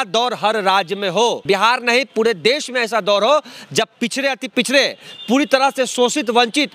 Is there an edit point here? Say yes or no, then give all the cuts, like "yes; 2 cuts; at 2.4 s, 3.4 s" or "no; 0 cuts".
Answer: yes; 1 cut; at 1.4 s